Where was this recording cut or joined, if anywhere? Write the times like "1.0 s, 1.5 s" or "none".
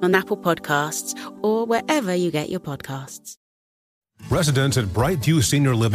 3.9 s